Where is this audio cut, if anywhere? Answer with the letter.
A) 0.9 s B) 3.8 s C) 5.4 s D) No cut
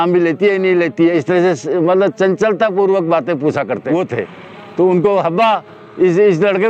B